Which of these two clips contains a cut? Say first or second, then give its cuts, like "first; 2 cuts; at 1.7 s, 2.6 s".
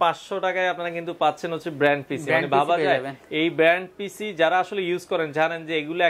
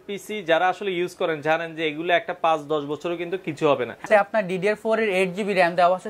second; 1 cut; at 4.1 s